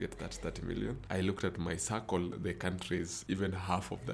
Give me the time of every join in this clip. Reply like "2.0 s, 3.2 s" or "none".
1.0 s, 3.2 s